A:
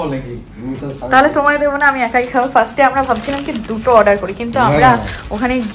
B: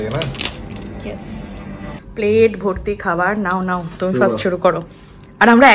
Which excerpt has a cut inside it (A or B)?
B